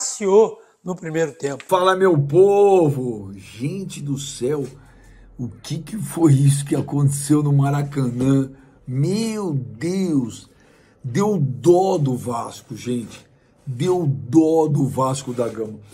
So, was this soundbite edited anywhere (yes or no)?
yes